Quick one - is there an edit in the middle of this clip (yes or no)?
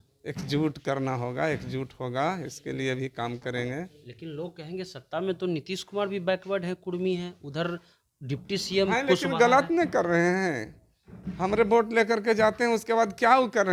no